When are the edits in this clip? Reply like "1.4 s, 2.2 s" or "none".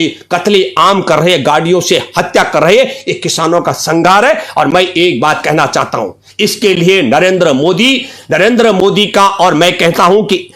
none